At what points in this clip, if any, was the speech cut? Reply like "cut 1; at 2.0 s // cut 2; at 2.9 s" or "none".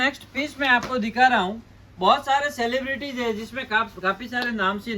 none